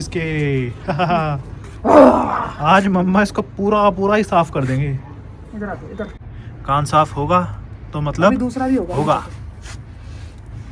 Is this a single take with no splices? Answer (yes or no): yes